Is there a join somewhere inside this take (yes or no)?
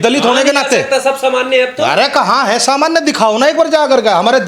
no